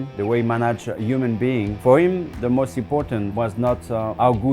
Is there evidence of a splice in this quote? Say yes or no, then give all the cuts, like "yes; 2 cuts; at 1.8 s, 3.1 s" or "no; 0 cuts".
yes; 1 cut; at 1.7 s